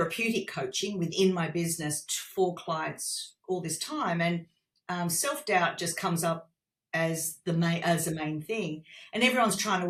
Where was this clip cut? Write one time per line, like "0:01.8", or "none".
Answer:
none